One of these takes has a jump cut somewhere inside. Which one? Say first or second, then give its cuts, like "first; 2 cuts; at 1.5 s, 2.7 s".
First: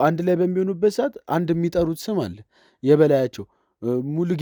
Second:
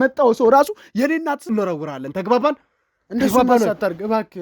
second; 1 cut; at 1.4 s